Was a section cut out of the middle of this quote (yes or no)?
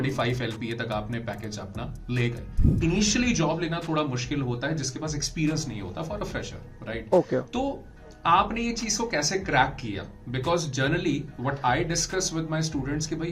yes